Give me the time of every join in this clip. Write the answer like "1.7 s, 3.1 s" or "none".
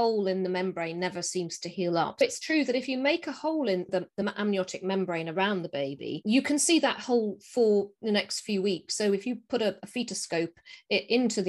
2.2 s, 3.9 s